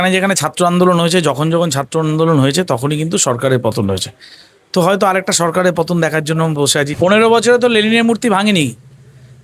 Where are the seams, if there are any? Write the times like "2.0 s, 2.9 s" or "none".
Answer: 6.9 s